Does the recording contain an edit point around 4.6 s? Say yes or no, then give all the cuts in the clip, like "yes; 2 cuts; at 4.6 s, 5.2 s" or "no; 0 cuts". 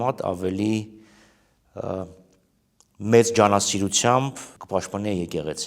yes; 1 cut; at 4.6 s